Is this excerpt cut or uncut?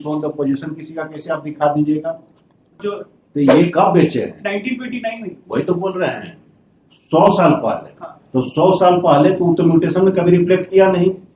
cut